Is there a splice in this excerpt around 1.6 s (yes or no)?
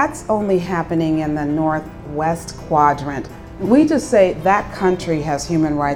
no